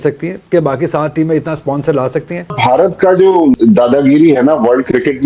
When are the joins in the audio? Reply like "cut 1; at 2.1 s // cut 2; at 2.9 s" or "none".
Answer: cut 1; at 2.5 s // cut 2; at 3.5 s